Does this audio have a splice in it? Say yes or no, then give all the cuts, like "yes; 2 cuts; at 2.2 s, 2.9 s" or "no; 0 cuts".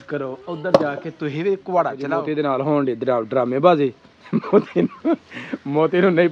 yes; 1 cut; at 2.2 s